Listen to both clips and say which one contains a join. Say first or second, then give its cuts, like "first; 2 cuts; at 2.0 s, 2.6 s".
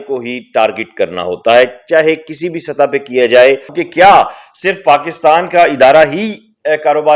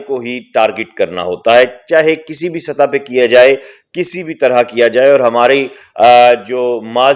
first; 1 cut; at 3.8 s